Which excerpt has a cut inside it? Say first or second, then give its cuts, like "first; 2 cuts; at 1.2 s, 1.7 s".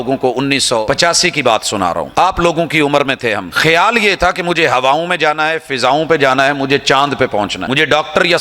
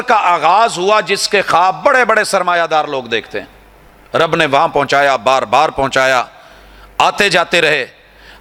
first; 4 cuts; at 0.8 s, 2.1 s, 3.5 s, 7.6 s